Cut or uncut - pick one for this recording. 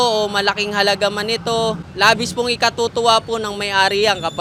uncut